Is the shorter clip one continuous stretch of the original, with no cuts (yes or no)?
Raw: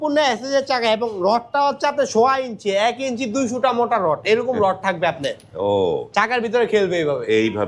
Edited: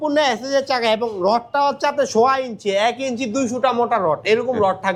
yes